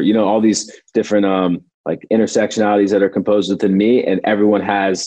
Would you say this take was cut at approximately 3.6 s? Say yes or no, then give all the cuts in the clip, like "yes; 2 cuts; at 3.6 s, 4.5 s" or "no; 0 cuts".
no; 1 cut; at 1.7 s